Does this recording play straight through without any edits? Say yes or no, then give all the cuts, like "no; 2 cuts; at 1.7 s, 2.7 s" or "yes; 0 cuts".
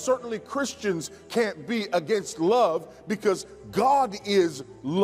yes; 0 cuts